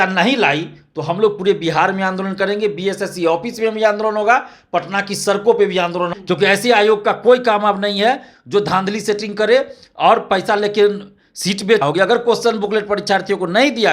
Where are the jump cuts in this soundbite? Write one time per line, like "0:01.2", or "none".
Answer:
0:06.1
0:11.8